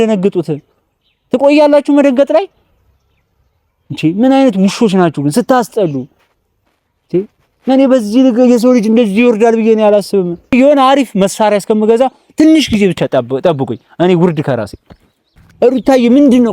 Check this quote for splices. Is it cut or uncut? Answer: cut